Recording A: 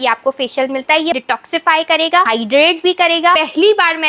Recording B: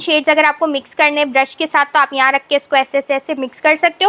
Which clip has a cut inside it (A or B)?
A